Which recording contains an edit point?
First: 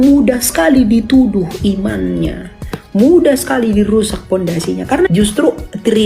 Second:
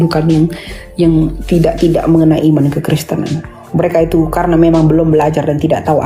first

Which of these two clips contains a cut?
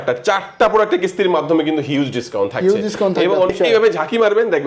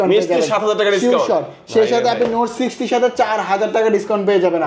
first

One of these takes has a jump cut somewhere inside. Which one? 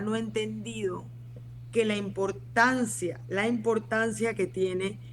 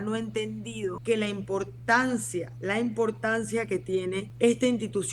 second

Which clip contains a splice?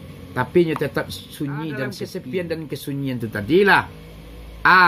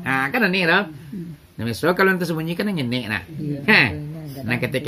first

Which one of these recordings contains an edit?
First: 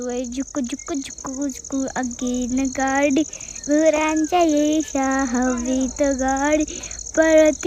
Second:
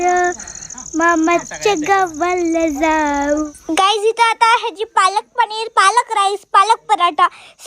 second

